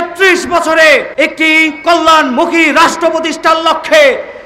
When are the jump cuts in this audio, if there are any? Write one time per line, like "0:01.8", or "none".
0:01.1